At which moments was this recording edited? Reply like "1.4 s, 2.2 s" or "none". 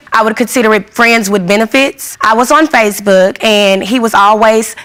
none